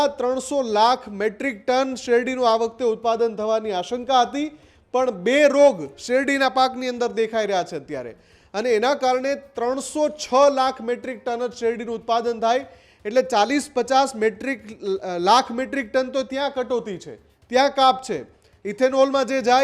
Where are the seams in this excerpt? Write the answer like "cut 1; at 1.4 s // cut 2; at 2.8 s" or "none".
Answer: none